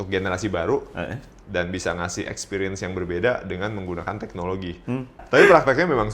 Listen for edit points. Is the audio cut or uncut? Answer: cut